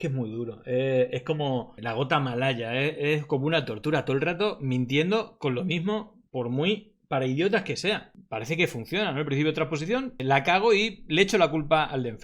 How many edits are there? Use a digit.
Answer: 2